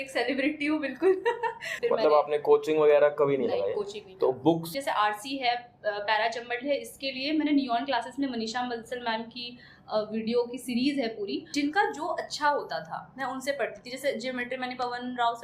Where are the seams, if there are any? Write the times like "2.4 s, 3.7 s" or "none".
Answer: 1.7 s, 4.7 s, 11.5 s